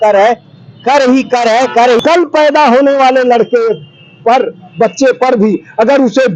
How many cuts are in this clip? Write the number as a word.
one